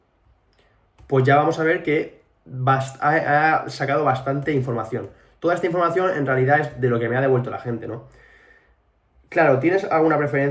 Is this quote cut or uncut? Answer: uncut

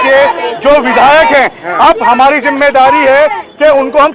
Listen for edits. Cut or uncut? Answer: uncut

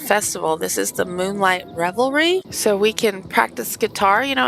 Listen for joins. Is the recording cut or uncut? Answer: cut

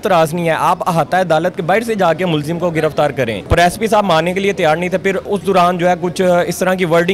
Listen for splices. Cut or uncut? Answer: cut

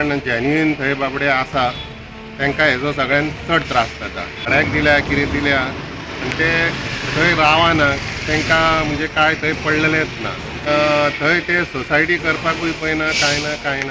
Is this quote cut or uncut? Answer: cut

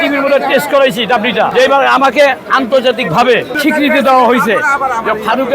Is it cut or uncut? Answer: cut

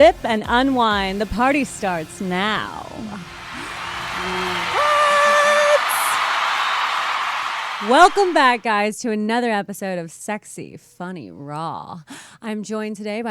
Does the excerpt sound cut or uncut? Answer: cut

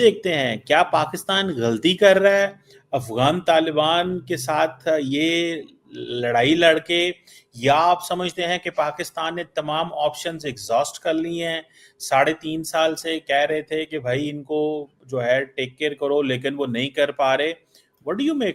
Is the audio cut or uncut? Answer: uncut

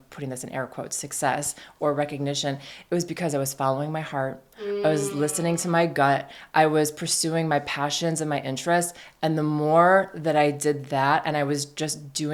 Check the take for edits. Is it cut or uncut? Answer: uncut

